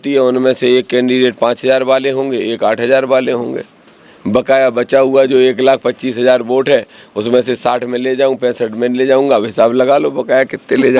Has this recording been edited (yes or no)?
no